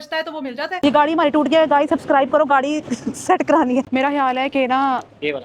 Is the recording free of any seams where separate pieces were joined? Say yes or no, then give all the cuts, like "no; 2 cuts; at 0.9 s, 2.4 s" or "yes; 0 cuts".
no; 2 cuts; at 0.8 s, 3.9 s